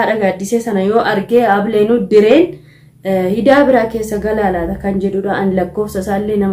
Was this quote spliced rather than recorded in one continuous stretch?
no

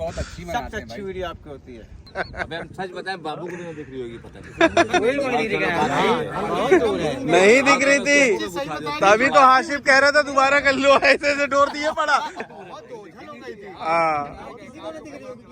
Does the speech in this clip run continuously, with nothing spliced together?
no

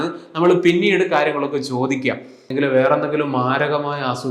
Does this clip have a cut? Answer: yes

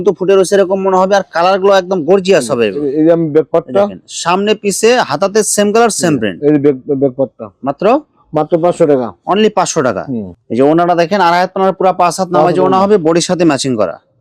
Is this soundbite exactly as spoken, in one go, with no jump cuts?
yes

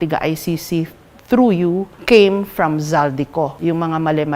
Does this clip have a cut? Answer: yes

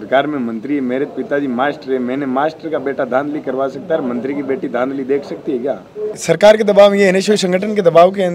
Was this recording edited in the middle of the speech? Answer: yes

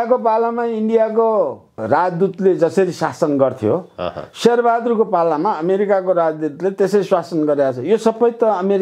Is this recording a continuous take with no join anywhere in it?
yes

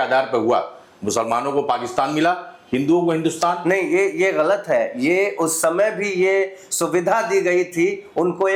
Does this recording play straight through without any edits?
yes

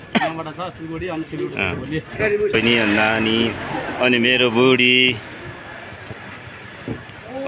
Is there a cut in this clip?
yes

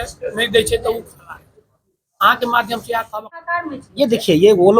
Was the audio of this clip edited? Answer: yes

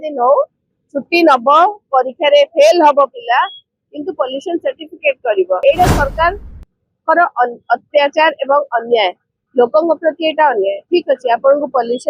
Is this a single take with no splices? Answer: no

